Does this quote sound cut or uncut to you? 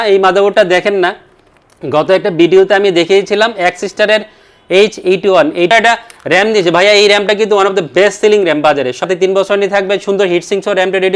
cut